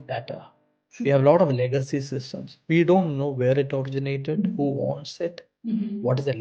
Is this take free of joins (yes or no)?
yes